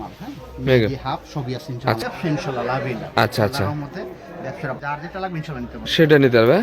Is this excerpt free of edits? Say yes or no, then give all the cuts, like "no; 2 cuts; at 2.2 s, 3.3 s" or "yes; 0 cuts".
no; 2 cuts; at 2.0 s, 4.8 s